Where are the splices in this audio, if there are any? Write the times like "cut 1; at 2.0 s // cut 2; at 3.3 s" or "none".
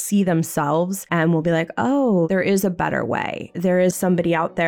cut 1; at 1.0 s // cut 2; at 2.3 s // cut 3; at 3.7 s